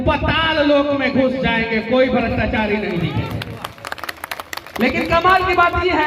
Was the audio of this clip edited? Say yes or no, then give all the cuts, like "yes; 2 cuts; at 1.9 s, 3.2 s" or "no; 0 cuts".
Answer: no; 0 cuts